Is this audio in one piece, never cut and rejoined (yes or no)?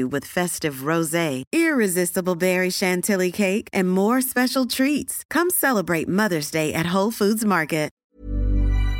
no